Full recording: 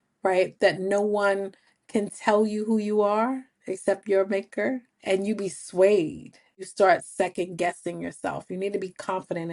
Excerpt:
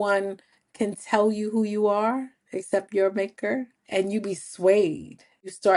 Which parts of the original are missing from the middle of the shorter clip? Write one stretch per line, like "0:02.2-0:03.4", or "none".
none